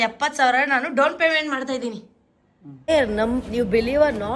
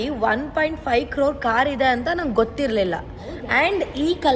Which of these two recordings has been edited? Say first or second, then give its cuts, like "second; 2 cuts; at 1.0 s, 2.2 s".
first; 1 cut; at 2.9 s